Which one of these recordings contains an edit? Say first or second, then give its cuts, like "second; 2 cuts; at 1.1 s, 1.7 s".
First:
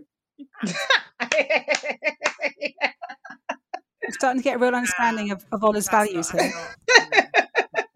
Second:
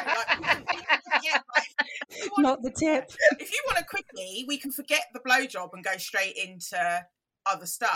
first; 1 cut; at 4.0 s